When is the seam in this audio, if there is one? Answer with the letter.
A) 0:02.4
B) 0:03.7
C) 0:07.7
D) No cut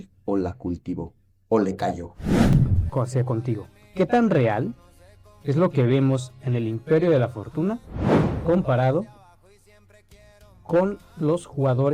A